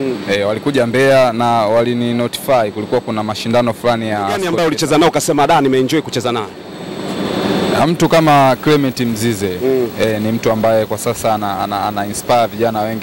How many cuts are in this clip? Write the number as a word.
one